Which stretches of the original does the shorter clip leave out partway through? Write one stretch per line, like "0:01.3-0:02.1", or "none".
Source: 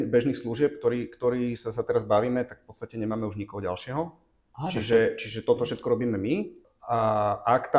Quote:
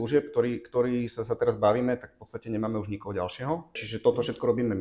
0:04.3-0:05.3